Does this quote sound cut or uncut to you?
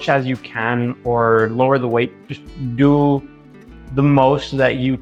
uncut